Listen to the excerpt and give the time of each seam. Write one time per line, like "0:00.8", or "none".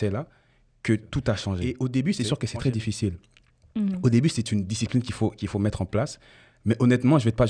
0:01.6